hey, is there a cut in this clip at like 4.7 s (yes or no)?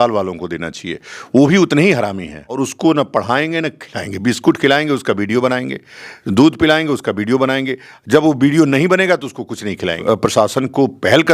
no